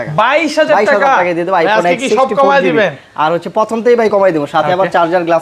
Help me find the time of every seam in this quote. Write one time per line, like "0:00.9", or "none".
none